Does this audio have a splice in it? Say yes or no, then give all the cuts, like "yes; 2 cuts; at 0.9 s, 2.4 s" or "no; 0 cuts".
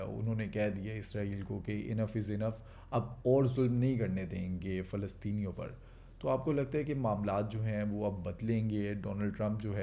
no; 0 cuts